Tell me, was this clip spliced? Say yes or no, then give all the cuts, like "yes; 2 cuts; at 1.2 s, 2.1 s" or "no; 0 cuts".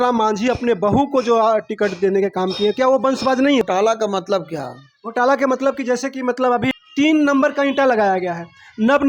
yes; 2 cuts; at 3.6 s, 6.7 s